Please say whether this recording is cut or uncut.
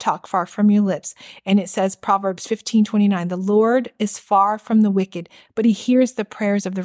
uncut